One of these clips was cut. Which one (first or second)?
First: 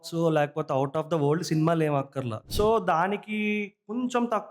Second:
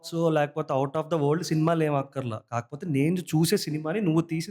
first